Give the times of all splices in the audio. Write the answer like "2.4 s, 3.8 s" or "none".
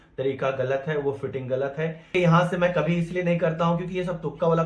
2.1 s